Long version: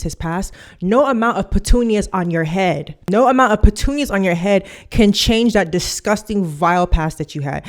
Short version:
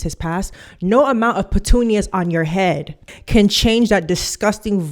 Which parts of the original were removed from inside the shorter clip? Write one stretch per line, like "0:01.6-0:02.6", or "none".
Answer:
0:03.0-0:04.7